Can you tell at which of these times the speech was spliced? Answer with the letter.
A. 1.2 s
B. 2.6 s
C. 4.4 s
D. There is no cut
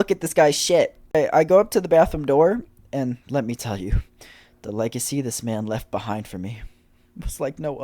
A